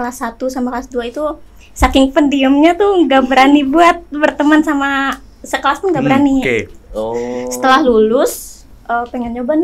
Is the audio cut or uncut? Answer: uncut